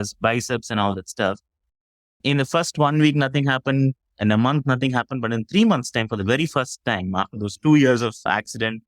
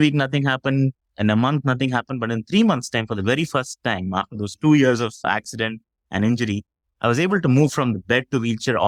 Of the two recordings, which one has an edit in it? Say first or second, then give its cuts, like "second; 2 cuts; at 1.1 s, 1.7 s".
first; 1 cut; at 1.6 s